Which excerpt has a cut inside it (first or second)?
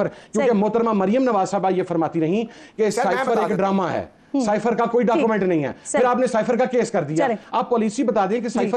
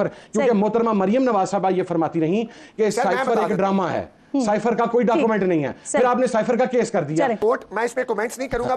second